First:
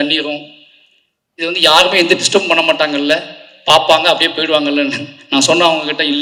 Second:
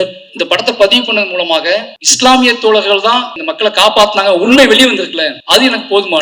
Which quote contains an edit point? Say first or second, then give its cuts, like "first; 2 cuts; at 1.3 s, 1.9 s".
second; 3 cuts; at 2.0 s, 3.4 s, 5.3 s